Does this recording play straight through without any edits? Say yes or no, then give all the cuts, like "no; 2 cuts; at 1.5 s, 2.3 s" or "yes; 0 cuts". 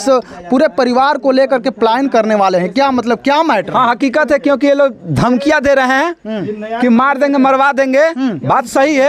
yes; 0 cuts